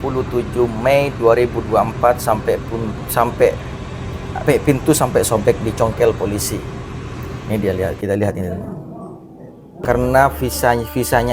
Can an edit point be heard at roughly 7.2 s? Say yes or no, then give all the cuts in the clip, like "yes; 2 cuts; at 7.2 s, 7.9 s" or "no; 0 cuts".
no; 1 cut; at 9.8 s